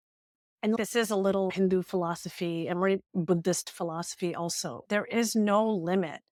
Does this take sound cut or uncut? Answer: uncut